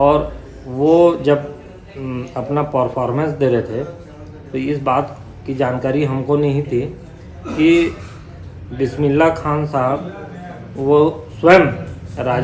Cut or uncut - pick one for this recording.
uncut